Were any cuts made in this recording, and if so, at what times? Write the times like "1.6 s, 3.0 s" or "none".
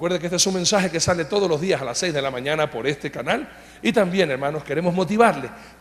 none